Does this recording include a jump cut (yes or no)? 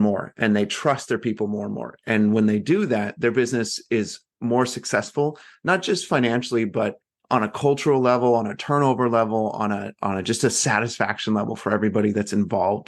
no